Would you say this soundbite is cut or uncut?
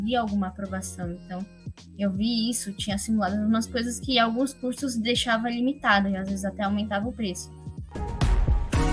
cut